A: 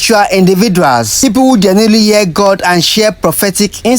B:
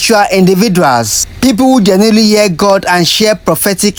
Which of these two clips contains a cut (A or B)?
A